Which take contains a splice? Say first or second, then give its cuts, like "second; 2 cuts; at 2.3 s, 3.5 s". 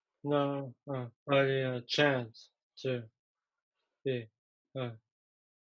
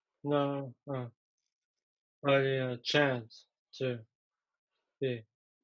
first; 1 cut; at 1.1 s